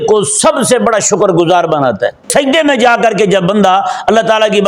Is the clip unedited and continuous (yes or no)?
no